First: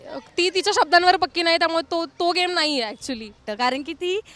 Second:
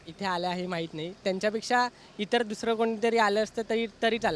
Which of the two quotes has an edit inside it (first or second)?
first